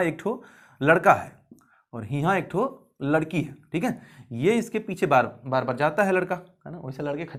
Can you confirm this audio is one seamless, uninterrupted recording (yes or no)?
yes